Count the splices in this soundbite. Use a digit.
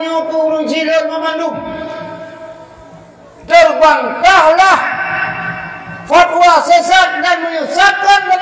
0